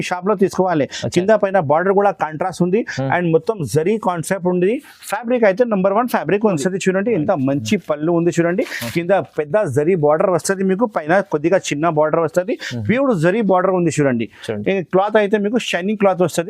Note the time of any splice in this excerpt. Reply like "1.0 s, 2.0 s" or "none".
6.6 s